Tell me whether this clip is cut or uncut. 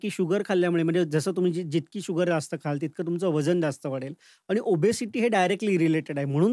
uncut